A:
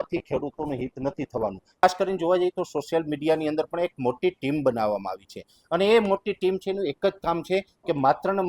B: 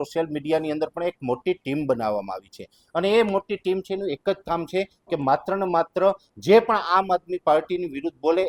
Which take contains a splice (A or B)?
A